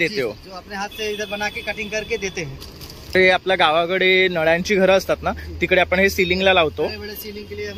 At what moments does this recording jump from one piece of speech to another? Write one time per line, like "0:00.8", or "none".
0:03.1